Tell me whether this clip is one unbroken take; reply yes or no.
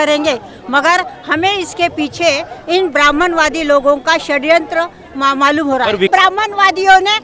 no